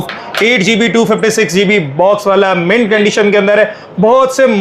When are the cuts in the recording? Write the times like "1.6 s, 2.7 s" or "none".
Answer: none